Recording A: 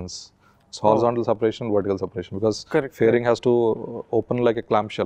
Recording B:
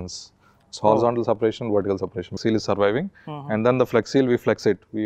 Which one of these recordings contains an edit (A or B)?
B